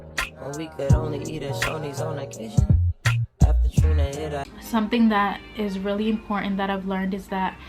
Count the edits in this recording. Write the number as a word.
one